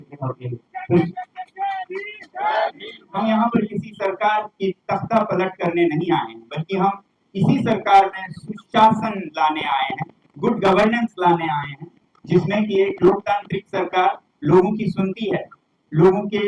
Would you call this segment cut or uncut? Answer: cut